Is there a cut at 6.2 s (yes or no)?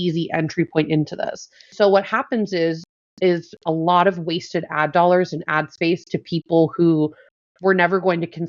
no